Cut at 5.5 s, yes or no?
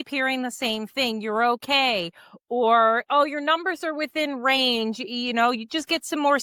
no